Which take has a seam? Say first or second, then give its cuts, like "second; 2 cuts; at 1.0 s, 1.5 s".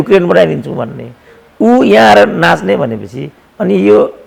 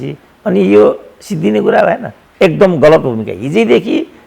second; 1 cut; at 2.2 s